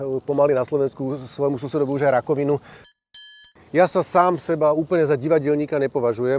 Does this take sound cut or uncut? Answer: cut